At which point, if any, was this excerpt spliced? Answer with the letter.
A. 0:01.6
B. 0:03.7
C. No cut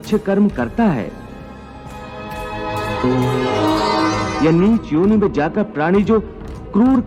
C